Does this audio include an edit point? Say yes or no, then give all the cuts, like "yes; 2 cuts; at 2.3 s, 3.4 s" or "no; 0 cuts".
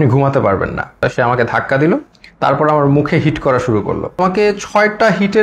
yes; 2 cuts; at 1.0 s, 4.2 s